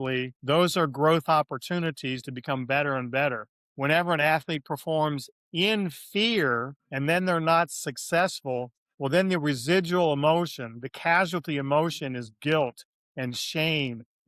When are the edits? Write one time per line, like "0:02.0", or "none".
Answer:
none